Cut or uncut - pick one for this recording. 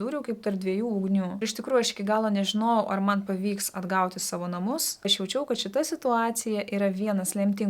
cut